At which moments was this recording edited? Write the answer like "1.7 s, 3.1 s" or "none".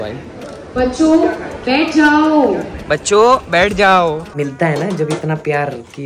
4.3 s